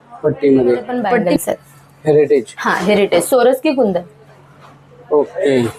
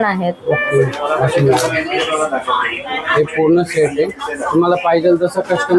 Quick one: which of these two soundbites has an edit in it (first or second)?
first